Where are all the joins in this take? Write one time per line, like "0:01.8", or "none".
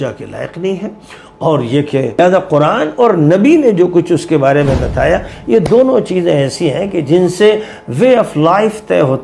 0:02.1